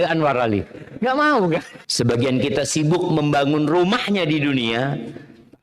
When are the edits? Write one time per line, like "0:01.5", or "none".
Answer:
0:01.8